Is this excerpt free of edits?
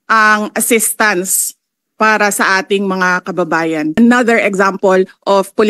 no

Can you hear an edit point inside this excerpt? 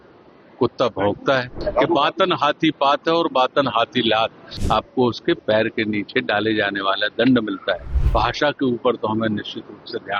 yes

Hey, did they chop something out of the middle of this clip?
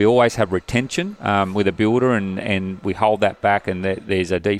yes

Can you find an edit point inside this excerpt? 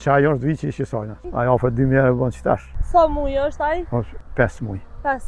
yes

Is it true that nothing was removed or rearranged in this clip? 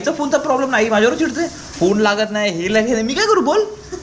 yes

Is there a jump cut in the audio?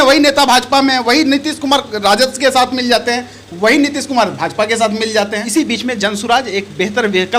yes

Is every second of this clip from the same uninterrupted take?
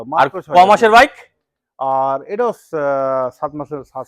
yes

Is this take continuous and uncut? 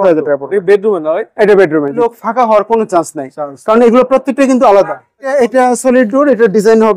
no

